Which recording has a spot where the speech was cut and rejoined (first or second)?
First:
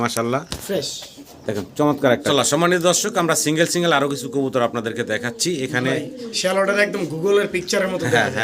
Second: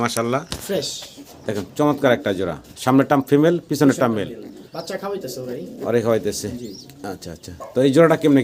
first